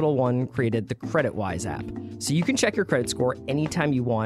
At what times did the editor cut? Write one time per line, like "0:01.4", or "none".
none